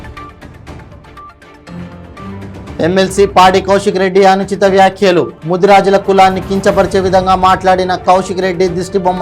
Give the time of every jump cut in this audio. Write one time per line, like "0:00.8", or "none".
0:02.4